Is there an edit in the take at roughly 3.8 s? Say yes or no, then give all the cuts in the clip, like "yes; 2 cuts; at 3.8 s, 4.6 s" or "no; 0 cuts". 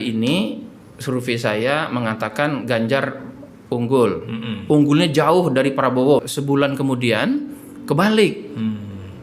no; 1 cut; at 6.2 s